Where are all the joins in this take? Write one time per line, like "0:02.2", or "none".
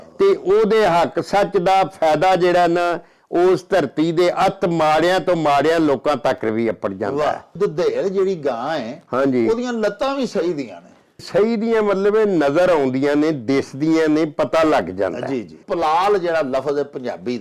0:07.6
0:11.3
0:15.6